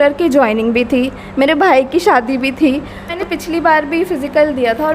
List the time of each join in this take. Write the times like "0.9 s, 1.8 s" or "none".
3.1 s